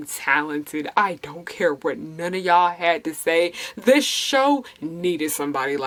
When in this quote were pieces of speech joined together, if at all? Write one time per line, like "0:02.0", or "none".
none